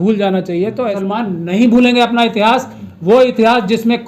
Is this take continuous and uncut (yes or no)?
no